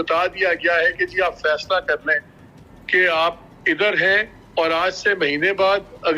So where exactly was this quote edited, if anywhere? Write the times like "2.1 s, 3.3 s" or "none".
4.4 s